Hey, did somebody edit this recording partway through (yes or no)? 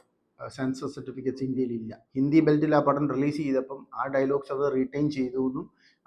yes